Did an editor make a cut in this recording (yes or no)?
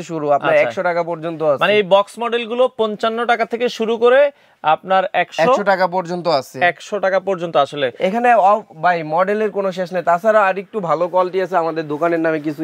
no